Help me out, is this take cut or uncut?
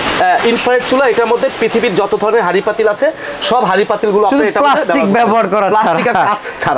uncut